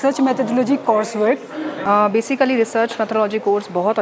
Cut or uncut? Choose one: cut